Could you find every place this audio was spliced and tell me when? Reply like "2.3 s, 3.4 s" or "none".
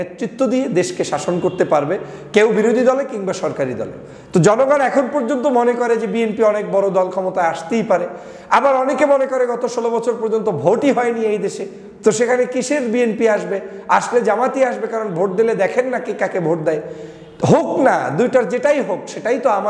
none